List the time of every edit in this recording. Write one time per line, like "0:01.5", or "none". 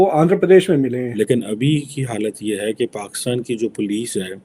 0:01.1